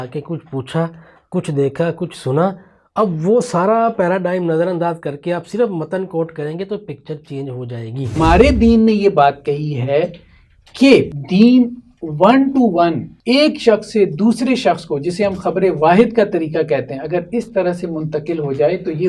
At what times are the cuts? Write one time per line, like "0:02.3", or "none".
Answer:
0:08.2
0:11.2
0:13.1